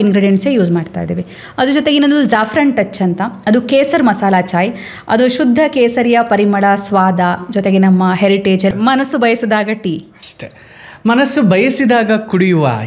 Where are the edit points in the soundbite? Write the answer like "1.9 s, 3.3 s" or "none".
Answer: 8.7 s